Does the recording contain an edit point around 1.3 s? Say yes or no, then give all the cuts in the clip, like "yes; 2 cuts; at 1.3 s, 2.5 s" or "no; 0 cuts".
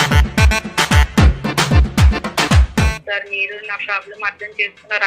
no; 1 cut; at 3.0 s